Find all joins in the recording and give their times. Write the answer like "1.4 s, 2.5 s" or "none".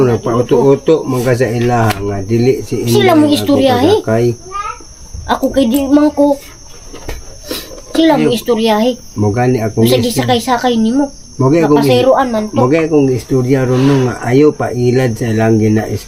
none